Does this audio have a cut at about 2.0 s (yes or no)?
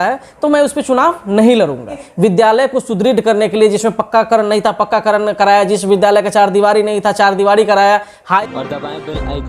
yes